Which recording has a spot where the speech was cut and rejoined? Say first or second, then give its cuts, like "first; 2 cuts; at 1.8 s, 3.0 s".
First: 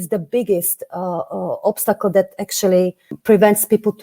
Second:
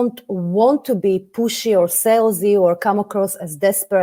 first; 1 cut; at 3.1 s